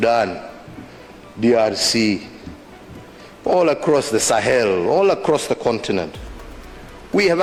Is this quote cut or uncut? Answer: uncut